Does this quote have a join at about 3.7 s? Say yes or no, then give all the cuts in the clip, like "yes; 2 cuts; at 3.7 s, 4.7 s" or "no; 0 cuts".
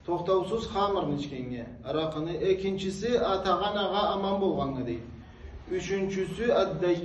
no; 0 cuts